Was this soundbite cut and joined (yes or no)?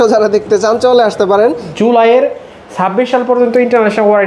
yes